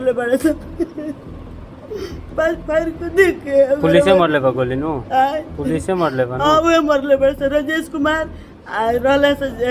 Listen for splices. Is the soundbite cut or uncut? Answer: uncut